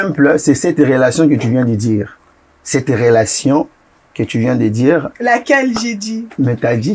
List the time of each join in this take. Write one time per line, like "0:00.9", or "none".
none

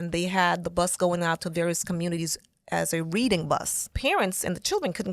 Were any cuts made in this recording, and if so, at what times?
0:03.9

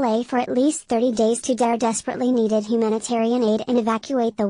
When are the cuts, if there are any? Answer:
none

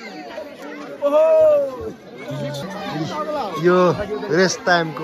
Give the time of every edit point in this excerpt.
0:03.0

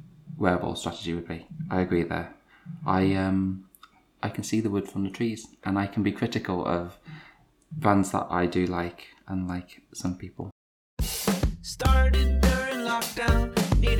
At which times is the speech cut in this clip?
0:10.5

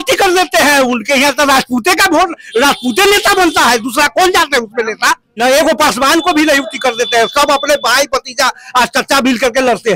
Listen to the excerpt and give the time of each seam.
0:05.4

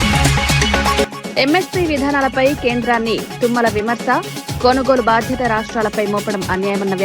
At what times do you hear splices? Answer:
0:01.0

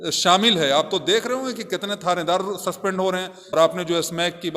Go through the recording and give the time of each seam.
0:03.5

